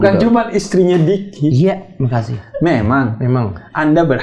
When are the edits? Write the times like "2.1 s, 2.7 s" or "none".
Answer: none